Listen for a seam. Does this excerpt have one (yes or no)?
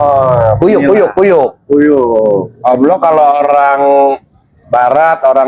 no